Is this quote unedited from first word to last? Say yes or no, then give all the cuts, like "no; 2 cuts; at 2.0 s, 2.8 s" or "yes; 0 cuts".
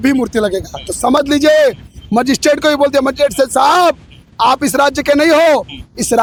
yes; 0 cuts